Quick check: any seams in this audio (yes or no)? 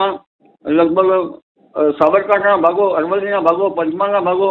no